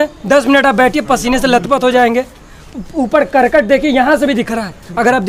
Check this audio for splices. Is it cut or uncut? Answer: uncut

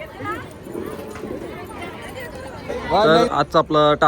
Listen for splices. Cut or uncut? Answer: cut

